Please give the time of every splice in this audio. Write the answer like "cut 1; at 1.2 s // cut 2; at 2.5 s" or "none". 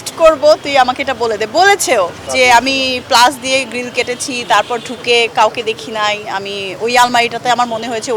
none